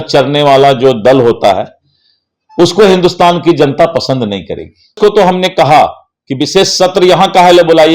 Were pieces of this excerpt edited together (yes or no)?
yes